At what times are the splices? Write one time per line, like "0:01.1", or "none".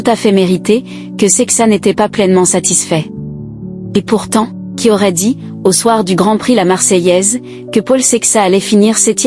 0:04.6